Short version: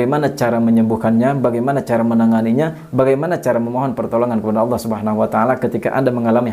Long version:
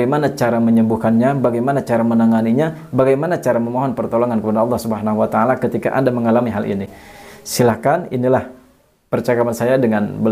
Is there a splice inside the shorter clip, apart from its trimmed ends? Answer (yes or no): no